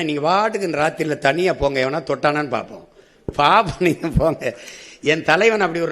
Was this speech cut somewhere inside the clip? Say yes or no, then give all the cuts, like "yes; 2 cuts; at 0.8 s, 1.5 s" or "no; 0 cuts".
no; 0 cuts